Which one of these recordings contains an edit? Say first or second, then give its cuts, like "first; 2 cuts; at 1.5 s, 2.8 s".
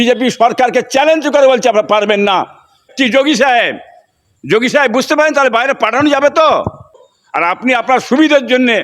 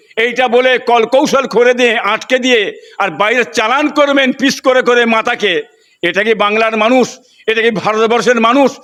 first; 2 cuts; at 2.9 s, 7.0 s